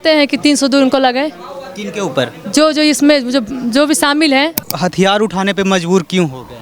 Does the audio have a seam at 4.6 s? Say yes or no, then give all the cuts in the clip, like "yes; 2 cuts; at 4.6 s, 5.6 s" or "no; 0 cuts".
yes; 1 cut; at 4.6 s